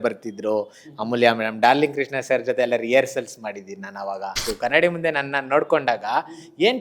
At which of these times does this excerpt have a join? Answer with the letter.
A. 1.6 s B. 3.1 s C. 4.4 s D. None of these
C